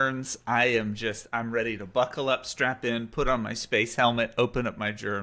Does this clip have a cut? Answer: no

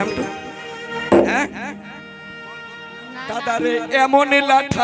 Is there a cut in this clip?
yes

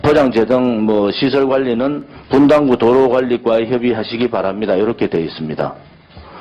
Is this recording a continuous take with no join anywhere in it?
yes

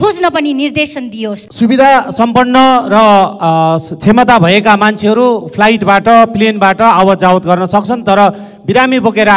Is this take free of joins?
no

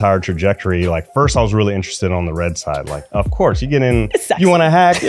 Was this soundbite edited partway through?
yes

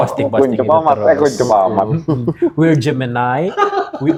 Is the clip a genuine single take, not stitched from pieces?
yes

